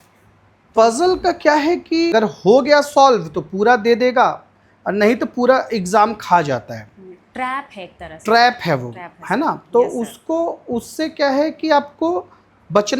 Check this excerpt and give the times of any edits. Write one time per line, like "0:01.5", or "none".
0:02.1